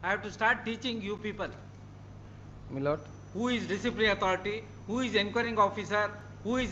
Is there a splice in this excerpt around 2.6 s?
no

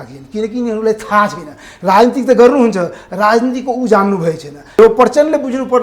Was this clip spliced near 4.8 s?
yes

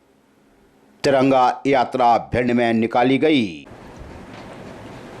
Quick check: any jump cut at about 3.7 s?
yes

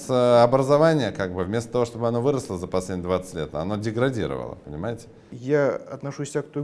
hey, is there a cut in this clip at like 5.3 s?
yes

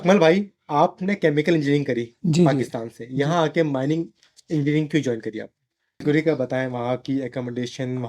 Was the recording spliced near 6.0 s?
yes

